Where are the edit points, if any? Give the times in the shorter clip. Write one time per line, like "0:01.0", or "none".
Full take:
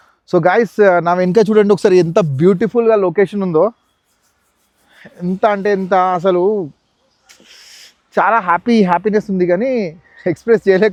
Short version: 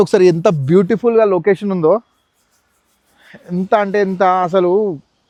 none